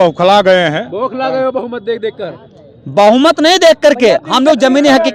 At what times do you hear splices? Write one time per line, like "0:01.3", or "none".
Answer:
none

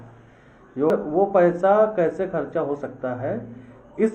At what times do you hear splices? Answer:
0:00.9

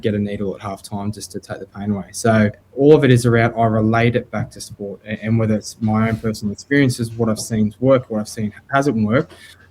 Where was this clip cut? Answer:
0:02.6

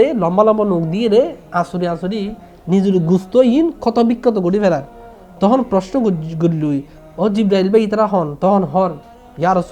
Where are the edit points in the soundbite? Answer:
0:07.0

